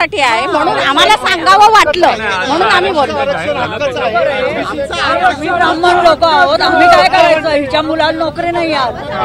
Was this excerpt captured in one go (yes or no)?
yes